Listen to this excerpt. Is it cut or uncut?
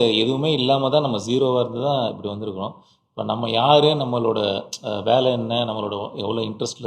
uncut